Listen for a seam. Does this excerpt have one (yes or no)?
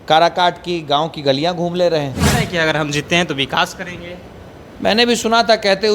yes